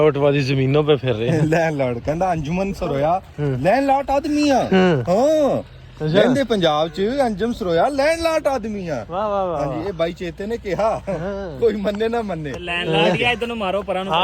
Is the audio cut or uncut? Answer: uncut